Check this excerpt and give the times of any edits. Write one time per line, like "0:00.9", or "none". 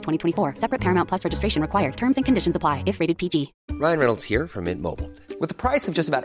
0:03.6